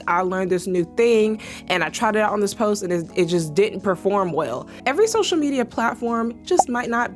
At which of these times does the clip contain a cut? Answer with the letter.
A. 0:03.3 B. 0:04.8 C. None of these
B